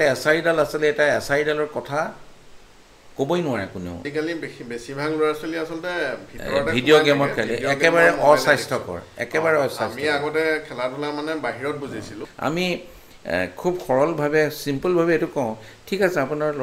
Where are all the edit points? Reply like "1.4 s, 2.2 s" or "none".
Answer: 4.1 s, 12.2 s